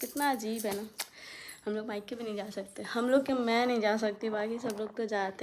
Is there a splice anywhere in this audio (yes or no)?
no